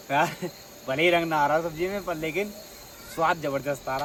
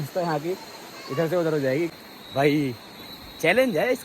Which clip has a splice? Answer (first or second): second